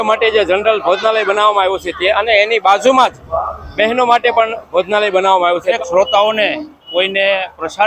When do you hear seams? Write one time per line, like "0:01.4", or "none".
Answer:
0:05.8